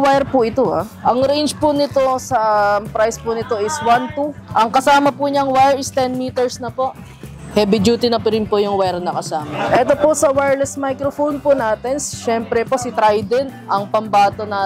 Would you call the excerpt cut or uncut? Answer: cut